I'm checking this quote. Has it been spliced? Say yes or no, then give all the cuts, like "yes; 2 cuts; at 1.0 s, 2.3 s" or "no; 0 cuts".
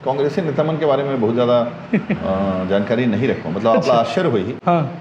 no; 0 cuts